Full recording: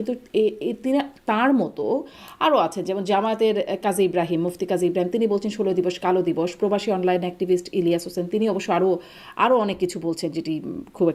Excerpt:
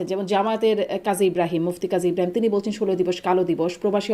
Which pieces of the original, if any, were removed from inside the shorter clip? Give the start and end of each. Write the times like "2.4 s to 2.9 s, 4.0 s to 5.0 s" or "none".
none

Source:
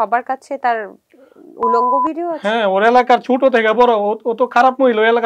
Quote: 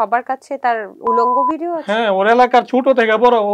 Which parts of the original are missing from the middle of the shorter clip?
0.9 s to 1.5 s

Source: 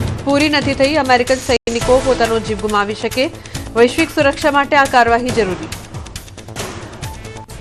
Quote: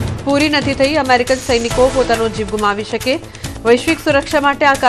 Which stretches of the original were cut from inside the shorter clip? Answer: 1.6 s to 1.7 s

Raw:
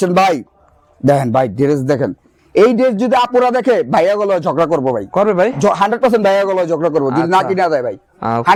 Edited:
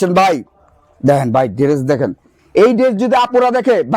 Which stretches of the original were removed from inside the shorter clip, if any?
none

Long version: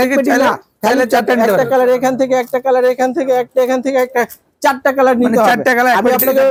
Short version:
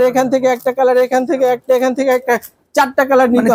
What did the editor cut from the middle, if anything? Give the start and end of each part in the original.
none

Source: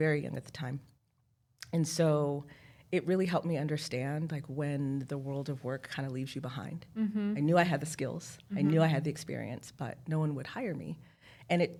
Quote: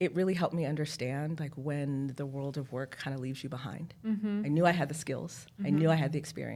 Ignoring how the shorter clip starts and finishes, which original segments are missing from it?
none

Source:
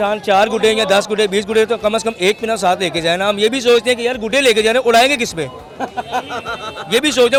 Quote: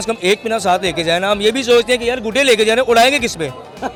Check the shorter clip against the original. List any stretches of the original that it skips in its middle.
none

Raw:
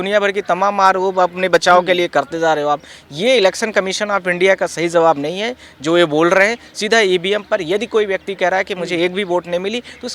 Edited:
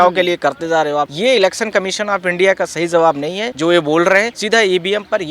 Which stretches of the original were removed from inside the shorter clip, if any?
2.8 s to 3.1 s, 5.5 s to 5.7 s, 6.6 s to 6.8 s

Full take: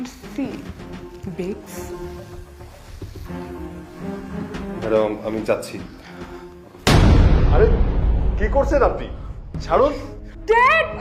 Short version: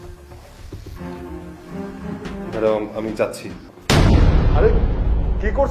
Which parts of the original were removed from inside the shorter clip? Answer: 6.0 s to 6.7 s

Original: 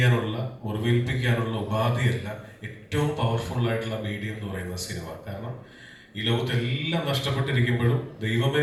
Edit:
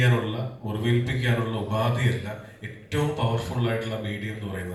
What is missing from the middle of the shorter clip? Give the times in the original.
none

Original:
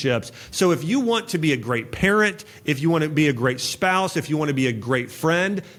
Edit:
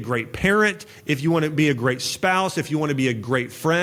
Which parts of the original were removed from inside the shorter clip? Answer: none

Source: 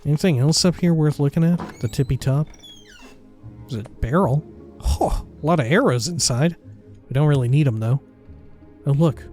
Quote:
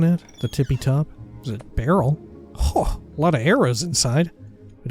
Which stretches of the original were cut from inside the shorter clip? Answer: 2.7 s to 3.5 s

